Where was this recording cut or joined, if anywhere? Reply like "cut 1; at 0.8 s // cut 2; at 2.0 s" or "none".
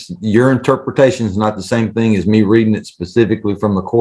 none